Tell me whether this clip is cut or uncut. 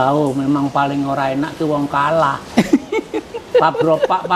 uncut